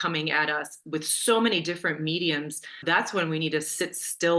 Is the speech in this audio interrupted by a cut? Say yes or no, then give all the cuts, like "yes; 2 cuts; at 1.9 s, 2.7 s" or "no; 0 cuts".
yes; 1 cut; at 2.8 s